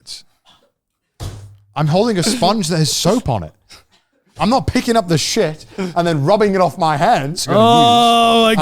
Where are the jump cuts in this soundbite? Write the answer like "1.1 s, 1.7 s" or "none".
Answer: 7.4 s